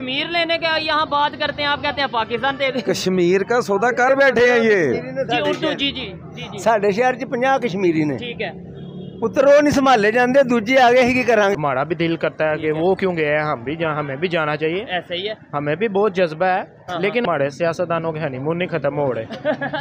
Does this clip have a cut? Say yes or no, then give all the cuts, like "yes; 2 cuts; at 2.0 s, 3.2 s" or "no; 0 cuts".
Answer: yes; 2 cuts; at 11.5 s, 17.2 s